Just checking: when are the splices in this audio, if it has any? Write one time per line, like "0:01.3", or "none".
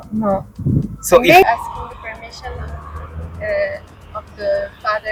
none